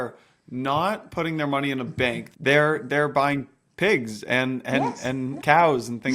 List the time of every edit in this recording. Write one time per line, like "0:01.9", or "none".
0:02.2
0:05.4